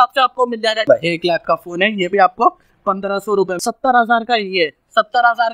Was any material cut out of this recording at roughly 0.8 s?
yes; 2 cuts; at 0.8 s, 3.6 s

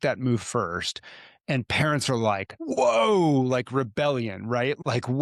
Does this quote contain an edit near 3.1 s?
no; 0 cuts

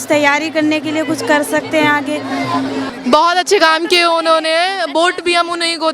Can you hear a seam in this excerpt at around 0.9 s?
no; 1 cut; at 2.9 s

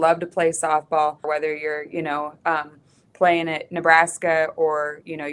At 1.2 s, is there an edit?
yes; 1 cut; at 1.2 s

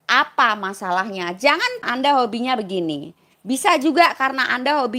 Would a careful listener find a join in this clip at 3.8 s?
no; 1 cut; at 1.9 s

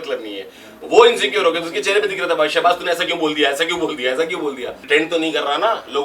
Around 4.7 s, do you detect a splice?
yes; 1 cut; at 4.7 s

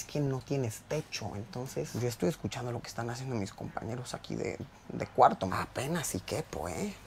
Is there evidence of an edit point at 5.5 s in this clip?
yes; 2 cuts; at 1.9 s, 5.5 s

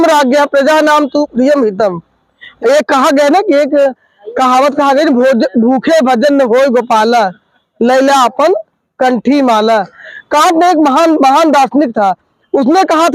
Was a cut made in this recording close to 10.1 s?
yes; 2 cuts; at 2.4 s, 10.1 s

